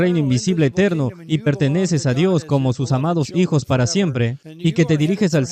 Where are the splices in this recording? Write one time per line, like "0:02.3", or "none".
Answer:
0:04.4